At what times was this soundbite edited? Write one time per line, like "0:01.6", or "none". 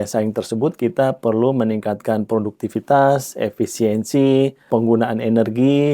0:04.7

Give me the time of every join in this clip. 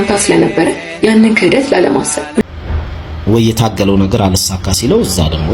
0:02.4

